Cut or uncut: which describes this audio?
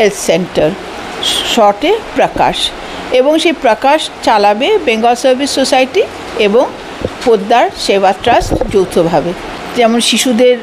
cut